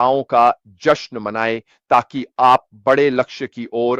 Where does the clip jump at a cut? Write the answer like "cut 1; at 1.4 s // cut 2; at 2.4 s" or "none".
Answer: none